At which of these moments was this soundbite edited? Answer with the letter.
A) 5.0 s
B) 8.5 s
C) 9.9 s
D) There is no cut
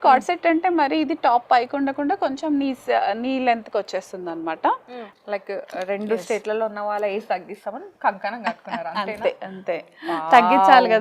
A